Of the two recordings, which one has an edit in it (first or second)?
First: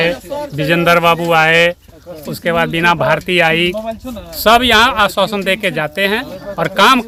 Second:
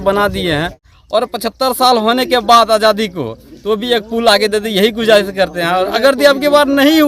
second